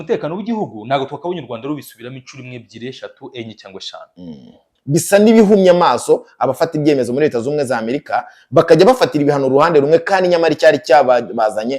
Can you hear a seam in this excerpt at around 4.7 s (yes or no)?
yes